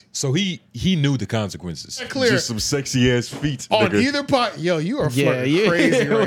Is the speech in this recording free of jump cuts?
no; 1 cut; at 2.1 s

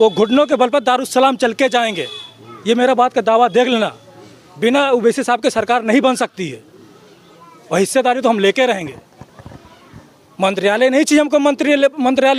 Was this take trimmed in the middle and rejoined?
no; 0 cuts

